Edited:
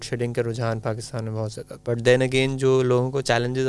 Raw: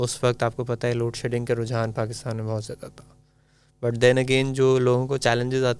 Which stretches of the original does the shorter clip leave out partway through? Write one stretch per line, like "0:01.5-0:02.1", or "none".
0:02.8-0:03.6